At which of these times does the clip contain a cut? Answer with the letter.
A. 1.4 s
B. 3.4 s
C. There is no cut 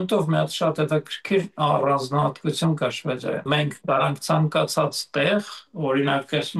B